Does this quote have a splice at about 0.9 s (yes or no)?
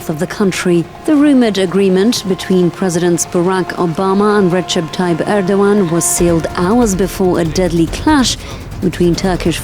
yes